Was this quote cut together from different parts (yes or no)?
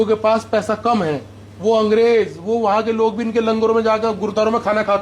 no